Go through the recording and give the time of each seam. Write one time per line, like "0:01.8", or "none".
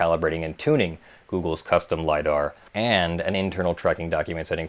none